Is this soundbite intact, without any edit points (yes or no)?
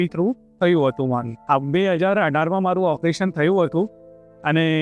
yes